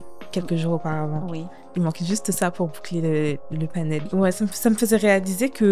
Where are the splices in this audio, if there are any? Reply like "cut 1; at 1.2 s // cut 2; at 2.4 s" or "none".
cut 1; at 4.1 s